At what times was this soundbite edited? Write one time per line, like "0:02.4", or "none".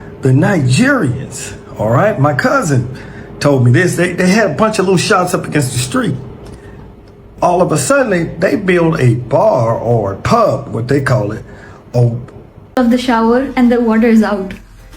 0:12.8